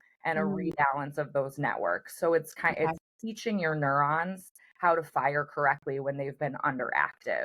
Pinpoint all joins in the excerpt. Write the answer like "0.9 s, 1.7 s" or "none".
none